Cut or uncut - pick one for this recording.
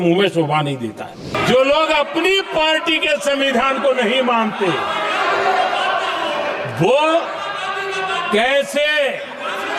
cut